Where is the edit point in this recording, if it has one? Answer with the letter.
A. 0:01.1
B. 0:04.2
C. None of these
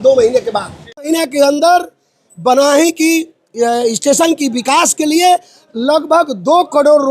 A